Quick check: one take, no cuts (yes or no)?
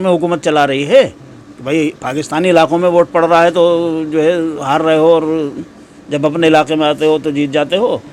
yes